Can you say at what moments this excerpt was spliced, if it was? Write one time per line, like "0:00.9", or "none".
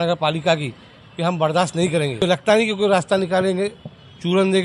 0:02.2